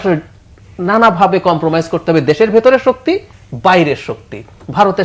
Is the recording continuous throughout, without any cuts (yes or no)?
no